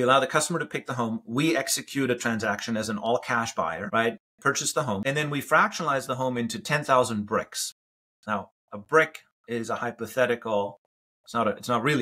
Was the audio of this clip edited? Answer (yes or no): yes